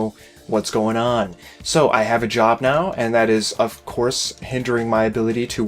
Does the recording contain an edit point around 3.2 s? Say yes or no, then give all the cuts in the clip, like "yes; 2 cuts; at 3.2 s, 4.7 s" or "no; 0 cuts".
no; 1 cut; at 1.0 s